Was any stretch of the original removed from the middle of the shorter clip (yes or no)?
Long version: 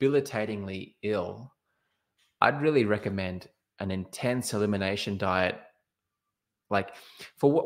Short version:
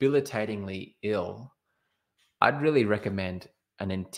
no